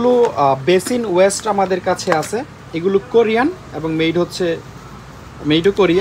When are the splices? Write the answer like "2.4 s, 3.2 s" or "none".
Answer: none